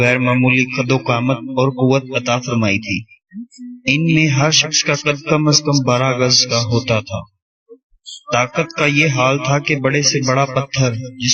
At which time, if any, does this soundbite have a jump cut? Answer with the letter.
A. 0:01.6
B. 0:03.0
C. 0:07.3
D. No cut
D